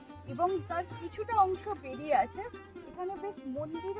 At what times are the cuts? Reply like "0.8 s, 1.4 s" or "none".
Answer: 2.6 s